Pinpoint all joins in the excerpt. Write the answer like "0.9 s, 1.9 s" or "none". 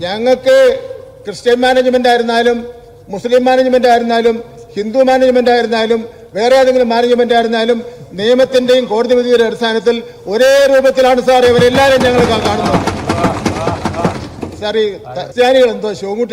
15.3 s